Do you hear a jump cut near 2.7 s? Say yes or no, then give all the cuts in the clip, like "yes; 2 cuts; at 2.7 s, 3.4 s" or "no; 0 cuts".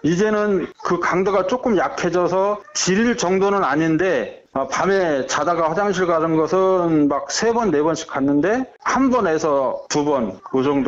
no; 2 cuts; at 4.5 s, 8.8 s